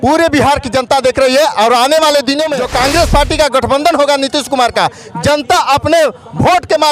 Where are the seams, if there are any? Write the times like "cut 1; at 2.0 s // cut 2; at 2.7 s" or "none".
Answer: cut 1; at 2.6 s